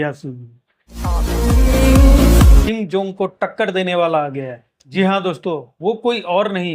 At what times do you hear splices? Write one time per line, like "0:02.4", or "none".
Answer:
0:02.6